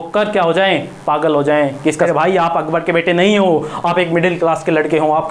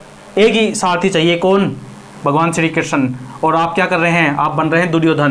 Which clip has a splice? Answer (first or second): first